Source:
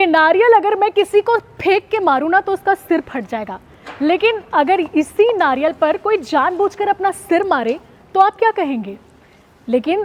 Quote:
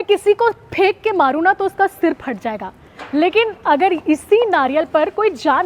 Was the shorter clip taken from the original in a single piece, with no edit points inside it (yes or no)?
yes